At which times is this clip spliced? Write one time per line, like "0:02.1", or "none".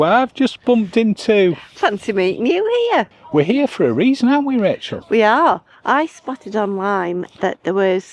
0:03.2